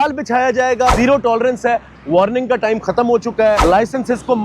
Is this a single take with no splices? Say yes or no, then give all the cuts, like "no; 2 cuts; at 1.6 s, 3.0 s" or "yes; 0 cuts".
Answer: no; 2 cuts; at 0.9 s, 3.6 s